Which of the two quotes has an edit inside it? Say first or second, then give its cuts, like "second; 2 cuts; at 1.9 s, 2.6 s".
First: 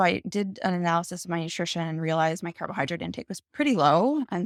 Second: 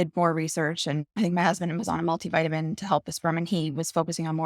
second; 1 cut; at 1.1 s